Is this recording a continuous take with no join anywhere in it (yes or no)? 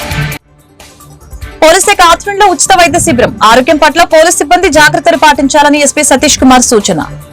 yes